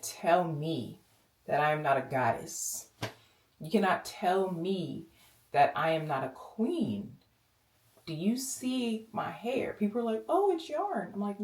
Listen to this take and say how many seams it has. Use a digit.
0